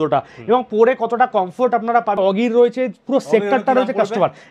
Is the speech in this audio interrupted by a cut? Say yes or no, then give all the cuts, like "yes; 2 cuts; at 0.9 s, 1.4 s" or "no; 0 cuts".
yes; 1 cut; at 2.2 s